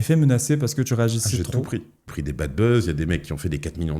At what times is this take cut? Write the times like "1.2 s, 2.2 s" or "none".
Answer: 2.0 s